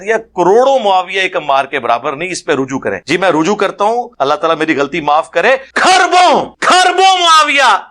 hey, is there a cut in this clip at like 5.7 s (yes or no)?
yes